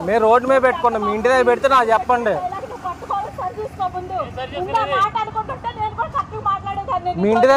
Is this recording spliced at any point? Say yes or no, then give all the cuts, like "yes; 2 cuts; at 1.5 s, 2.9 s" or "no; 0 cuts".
yes; 1 cut; at 3.3 s